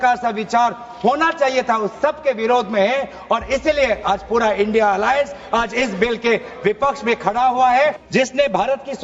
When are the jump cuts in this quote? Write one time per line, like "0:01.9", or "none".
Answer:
0:08.0

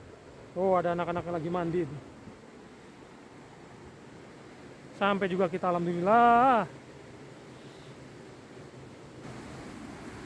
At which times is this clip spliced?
0:09.3

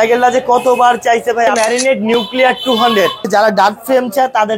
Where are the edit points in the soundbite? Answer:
0:01.5
0:03.2

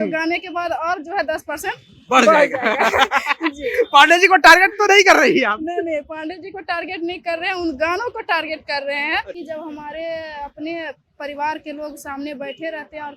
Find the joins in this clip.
0:09.4

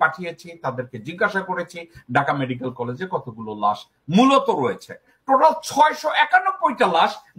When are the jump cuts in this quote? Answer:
0:05.1

